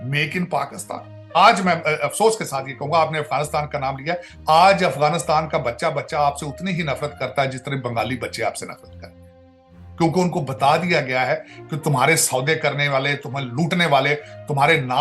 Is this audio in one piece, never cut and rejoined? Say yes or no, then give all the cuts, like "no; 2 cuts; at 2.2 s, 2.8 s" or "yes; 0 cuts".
no; 1 cut; at 1.4 s